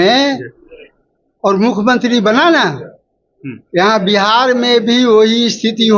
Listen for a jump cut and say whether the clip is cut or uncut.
uncut